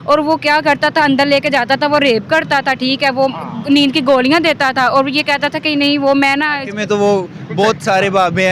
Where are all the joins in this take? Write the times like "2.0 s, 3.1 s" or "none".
6.6 s